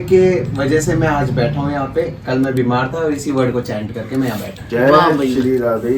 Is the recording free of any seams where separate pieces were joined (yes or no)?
yes